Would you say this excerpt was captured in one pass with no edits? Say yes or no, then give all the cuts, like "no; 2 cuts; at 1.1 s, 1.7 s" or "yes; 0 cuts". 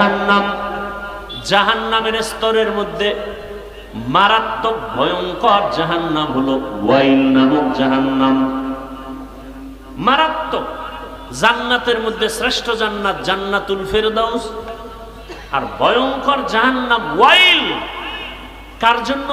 yes; 0 cuts